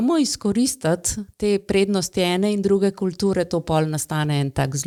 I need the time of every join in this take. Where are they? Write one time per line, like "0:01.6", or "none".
none